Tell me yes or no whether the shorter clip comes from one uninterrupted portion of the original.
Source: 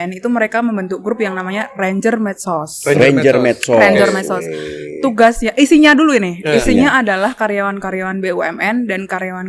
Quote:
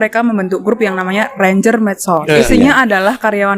no